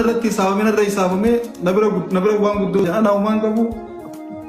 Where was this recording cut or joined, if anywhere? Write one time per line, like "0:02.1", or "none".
0:02.8